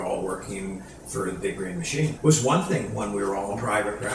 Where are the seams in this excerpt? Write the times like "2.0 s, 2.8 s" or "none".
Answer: 2.2 s